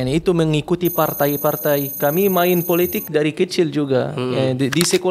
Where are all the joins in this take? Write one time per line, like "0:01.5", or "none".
none